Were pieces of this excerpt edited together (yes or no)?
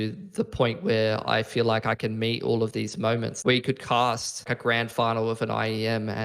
yes